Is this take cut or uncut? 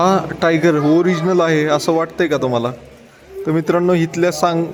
uncut